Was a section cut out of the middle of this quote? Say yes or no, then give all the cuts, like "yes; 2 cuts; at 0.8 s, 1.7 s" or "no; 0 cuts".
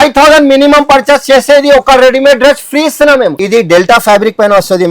yes; 1 cut; at 3.4 s